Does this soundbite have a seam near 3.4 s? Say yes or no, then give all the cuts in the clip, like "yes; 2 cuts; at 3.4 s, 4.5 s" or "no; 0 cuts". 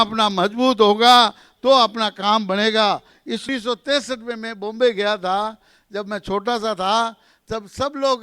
yes; 1 cut; at 3.4 s